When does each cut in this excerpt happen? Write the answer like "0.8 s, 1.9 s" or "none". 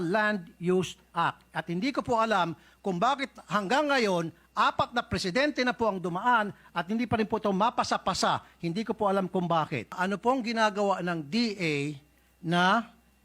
10.0 s